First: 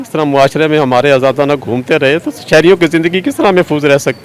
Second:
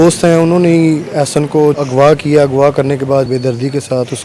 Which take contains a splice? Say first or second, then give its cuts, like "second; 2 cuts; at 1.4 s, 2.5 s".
second; 2 cuts; at 1.8 s, 3.3 s